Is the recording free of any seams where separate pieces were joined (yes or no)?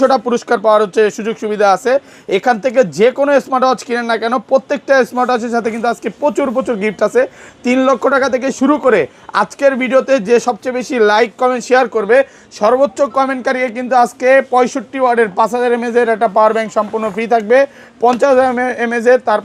yes